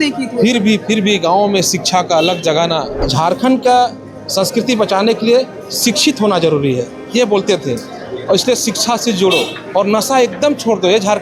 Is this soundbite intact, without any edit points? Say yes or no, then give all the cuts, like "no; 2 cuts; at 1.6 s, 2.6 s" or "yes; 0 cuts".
no; 1 cut; at 3.1 s